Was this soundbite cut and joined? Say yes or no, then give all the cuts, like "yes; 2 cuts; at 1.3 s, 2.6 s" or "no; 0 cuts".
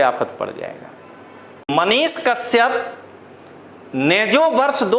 yes; 1 cut; at 1.7 s